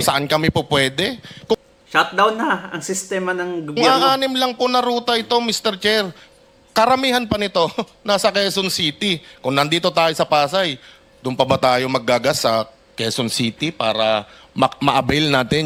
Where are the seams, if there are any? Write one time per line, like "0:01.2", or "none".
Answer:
none